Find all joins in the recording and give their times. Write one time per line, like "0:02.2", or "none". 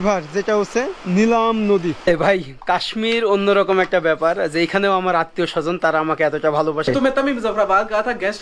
0:02.1
0:06.9